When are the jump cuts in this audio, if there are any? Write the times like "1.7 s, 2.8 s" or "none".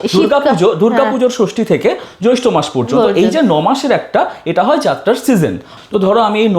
5.7 s